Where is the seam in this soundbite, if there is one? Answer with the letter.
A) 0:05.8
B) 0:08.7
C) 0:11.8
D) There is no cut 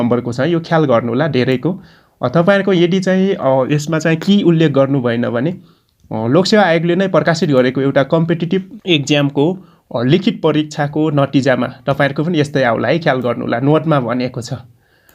B